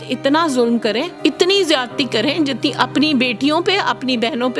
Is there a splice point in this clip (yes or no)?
yes